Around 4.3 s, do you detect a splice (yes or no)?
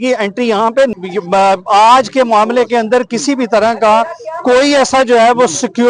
no